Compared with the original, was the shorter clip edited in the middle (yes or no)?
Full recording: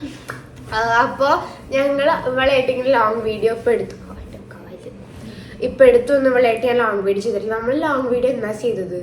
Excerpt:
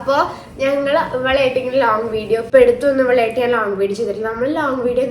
yes